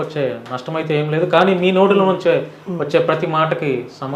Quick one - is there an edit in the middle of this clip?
no; 0 cuts

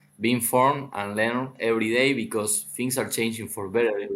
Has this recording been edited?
no; 0 cuts

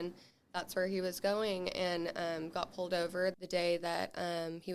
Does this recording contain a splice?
yes; 1 cut; at 3.3 s

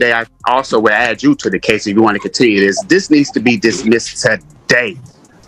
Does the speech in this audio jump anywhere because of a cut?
no; 0 cuts

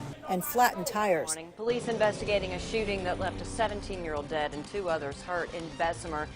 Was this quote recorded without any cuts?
no; 1 cut; at 1.4 s

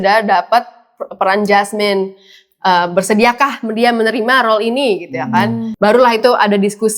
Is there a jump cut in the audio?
yes; 1 cut; at 5.7 s

